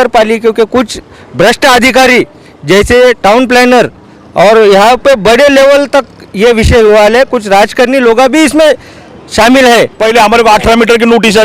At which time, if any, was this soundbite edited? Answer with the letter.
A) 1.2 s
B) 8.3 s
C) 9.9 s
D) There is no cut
C